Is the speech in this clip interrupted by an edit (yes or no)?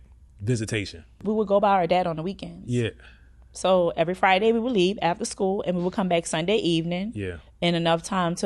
yes